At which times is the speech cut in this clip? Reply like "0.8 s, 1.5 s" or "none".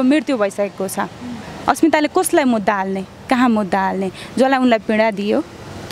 none